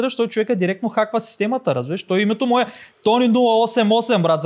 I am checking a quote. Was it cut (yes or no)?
no